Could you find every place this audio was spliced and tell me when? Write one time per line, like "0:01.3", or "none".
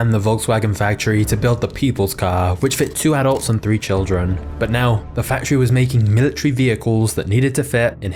none